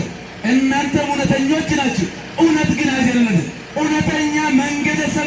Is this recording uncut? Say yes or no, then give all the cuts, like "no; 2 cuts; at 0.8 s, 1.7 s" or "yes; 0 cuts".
no; 1 cut; at 3.6 s